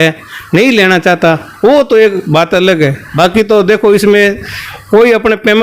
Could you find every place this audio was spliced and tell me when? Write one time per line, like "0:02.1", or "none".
0:03.0